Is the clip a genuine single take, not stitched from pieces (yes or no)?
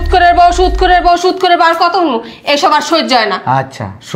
yes